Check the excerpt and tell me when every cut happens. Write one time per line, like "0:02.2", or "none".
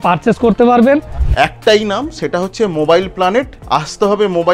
0:01.2
0:03.6